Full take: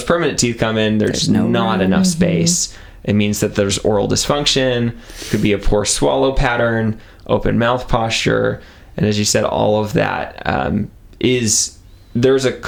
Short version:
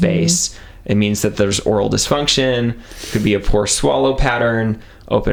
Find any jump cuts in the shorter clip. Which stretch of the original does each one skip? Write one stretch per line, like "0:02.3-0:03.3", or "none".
none